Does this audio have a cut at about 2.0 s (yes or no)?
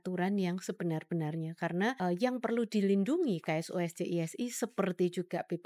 yes